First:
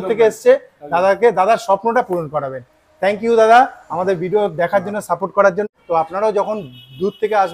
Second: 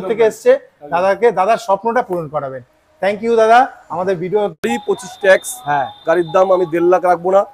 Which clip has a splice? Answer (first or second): second